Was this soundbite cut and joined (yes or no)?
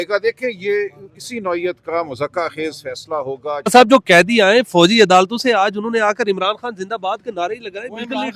yes